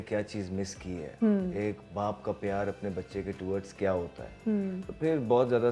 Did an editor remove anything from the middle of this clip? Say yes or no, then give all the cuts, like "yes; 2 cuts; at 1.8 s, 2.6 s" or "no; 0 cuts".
no; 0 cuts